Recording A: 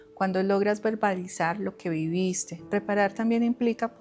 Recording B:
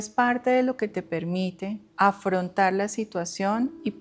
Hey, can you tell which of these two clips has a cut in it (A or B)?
A